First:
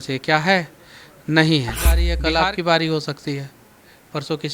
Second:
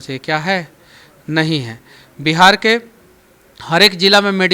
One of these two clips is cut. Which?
first; 1 cut; at 2.1 s

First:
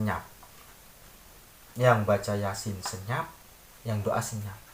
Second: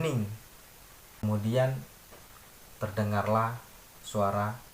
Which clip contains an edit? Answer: second; 1 cut; at 1.2 s

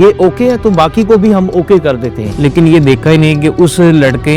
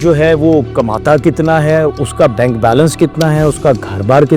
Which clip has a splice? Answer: first; 1 cut; at 2.3 s

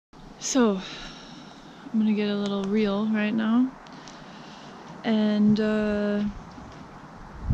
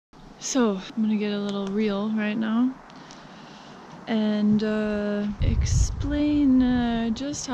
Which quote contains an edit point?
second; 2 cuts; at 0.9 s, 5.4 s

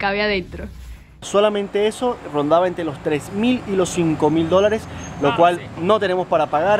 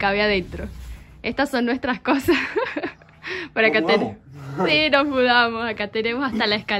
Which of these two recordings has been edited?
first; 1 cut; at 1.3 s

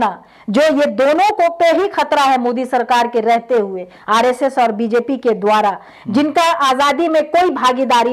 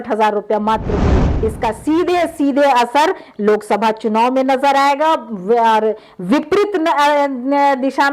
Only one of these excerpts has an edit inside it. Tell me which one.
second; 1 cut; at 1.3 s

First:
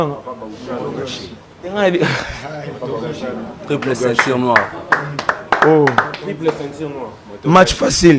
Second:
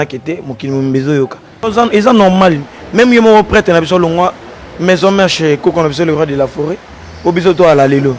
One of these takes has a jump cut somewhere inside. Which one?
second; 1 cut; at 1.6 s

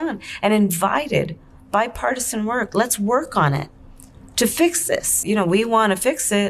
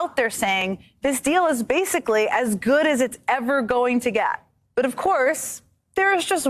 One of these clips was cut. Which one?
first; 1 cut; at 5.2 s

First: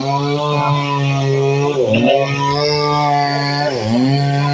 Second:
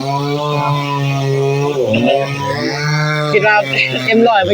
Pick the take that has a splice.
second; 1 cut; at 2.7 s

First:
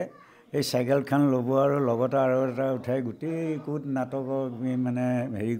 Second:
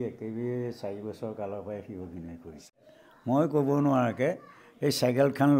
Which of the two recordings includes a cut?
second; 1 cut; at 2.8 s

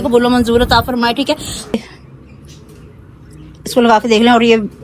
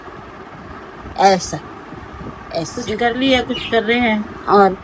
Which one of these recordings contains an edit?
first; 1 cut; at 1.8 s

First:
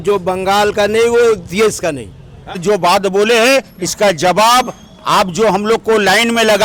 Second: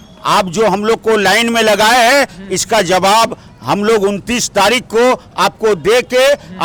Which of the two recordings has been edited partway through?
first; 1 cut; at 2.6 s

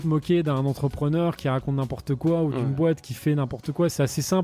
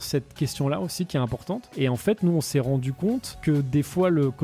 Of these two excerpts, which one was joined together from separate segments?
second; 2 cuts; at 1.7 s, 3.4 s

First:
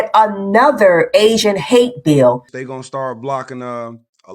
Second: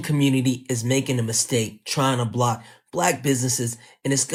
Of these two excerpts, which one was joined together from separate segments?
first; 1 cut; at 2.5 s

